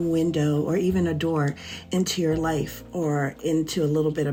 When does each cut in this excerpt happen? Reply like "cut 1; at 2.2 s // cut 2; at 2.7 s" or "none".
none